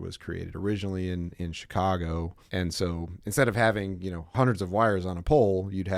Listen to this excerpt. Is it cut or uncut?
cut